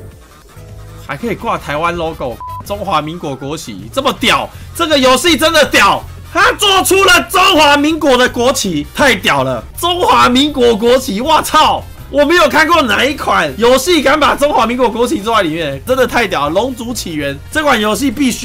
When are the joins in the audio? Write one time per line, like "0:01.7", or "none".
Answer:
0:17.4

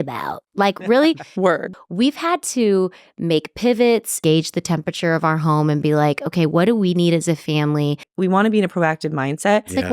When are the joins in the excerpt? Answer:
0:01.7
0:04.1
0:08.1

